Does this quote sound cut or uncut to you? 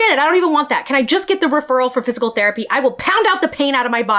uncut